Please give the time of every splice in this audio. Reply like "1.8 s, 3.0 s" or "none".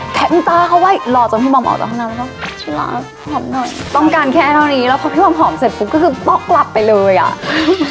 none

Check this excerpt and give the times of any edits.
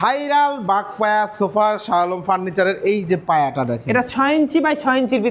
none

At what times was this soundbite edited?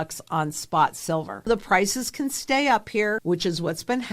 1.5 s, 3.2 s

